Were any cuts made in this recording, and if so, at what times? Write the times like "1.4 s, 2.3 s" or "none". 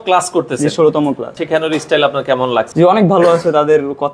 1.4 s, 2.7 s